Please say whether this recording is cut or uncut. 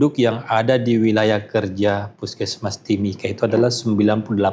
uncut